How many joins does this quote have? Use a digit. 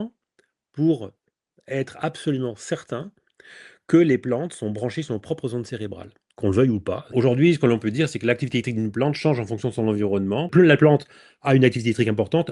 2